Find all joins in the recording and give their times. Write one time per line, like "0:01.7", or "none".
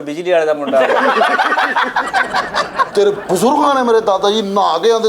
0:02.9